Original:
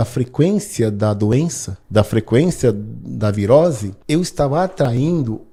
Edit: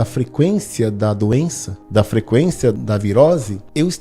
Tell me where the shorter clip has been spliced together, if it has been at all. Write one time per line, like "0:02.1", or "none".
0:02.8